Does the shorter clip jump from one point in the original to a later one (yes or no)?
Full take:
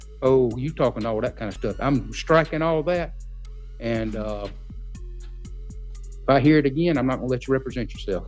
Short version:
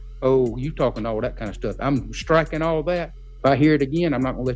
yes